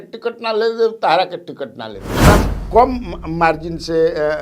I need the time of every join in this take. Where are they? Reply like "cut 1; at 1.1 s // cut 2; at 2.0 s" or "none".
cut 1; at 2.3 s

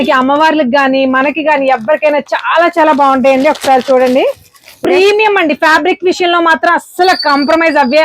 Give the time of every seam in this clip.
cut 1; at 4.7 s

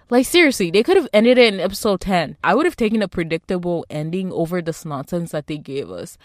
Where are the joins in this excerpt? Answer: cut 1; at 2.4 s

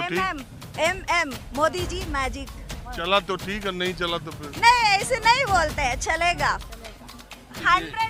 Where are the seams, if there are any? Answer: none

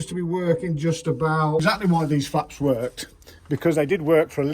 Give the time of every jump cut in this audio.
cut 1; at 1.6 s

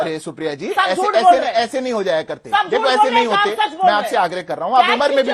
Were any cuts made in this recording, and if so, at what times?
none

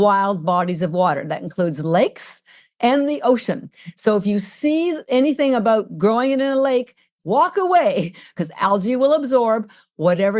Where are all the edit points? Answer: cut 1; at 7.1 s // cut 2; at 8.3 s

